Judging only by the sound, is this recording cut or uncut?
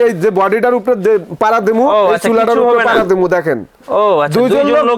uncut